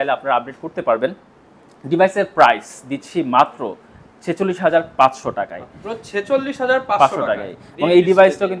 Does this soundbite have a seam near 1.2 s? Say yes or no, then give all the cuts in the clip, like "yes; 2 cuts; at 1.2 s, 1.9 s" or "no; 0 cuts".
no; 0 cuts